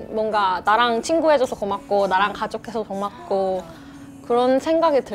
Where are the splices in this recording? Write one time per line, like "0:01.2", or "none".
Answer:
none